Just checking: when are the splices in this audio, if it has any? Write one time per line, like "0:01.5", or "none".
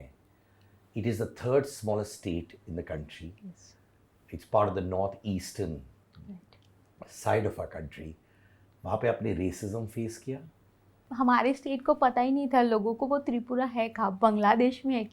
0:11.0